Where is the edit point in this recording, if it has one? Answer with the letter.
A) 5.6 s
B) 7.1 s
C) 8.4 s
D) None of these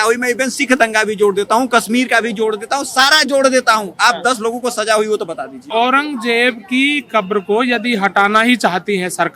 A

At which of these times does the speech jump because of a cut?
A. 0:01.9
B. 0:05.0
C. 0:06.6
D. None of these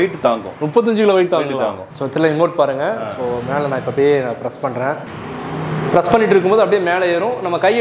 A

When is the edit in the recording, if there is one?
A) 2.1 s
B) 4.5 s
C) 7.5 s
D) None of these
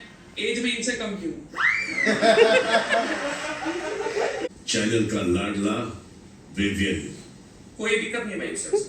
B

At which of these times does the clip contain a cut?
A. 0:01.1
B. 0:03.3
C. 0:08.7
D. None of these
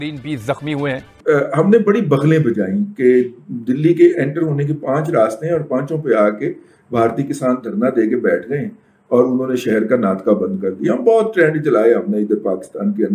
A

